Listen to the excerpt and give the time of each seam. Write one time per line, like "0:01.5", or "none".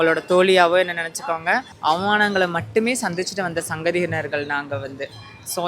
0:01.7

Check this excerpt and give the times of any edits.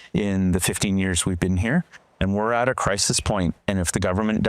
0:02.0

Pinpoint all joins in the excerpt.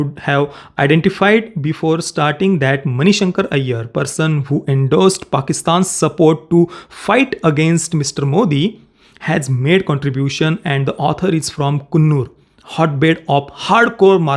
none

